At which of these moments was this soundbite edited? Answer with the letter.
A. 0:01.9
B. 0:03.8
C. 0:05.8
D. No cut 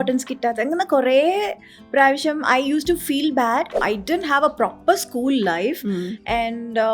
B